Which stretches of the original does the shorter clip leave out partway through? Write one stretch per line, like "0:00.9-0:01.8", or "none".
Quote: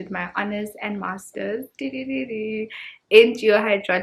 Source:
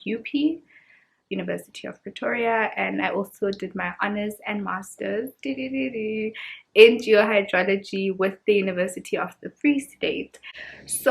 none